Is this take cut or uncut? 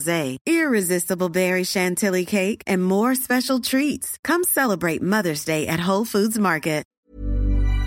cut